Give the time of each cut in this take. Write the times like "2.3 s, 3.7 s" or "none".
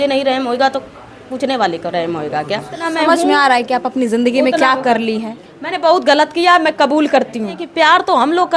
2.9 s, 7.7 s